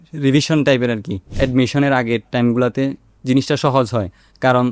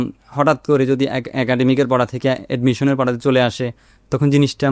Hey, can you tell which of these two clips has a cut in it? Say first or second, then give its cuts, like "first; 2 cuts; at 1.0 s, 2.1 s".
first; 1 cut; at 1.3 s